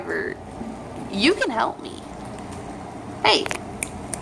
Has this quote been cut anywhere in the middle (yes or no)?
no